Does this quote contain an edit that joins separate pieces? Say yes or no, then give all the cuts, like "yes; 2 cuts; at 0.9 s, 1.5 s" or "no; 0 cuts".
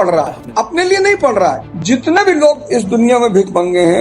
yes; 1 cut; at 1.7 s